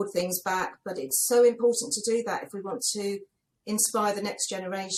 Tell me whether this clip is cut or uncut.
uncut